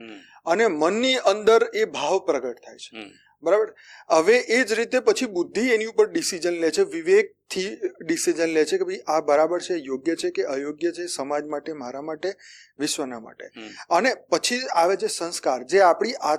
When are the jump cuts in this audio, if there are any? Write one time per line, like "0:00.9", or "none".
none